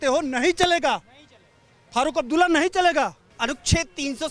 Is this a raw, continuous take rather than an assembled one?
no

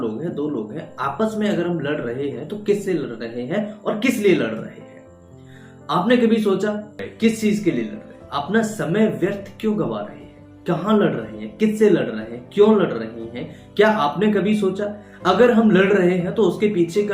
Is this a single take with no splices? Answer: no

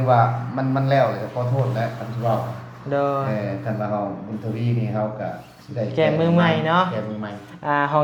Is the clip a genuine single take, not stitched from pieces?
yes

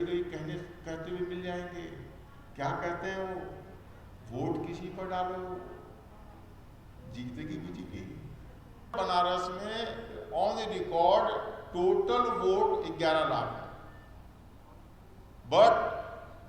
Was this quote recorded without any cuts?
no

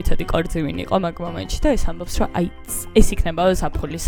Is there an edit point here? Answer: no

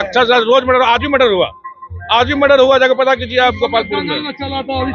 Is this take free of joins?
yes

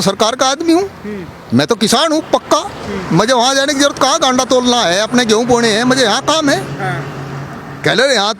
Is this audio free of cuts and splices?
yes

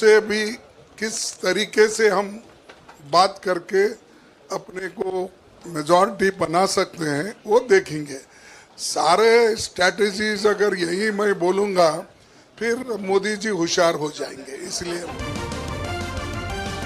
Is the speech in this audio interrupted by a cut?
yes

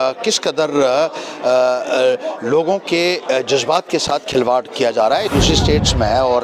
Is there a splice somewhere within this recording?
yes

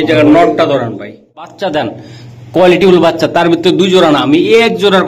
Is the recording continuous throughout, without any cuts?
no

